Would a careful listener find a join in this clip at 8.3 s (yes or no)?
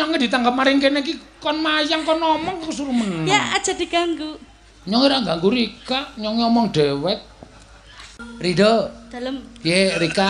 yes